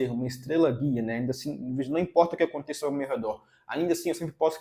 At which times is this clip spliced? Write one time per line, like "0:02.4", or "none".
none